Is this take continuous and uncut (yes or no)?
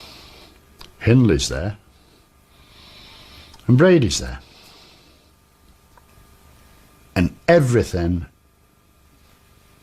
no